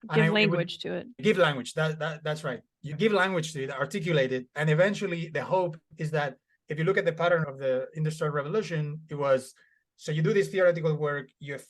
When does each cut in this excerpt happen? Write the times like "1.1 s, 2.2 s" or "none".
1.2 s, 2.8 s